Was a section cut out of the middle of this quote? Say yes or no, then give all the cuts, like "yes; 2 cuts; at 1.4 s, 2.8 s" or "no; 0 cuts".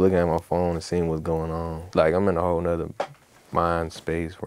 yes; 1 cut; at 1.8 s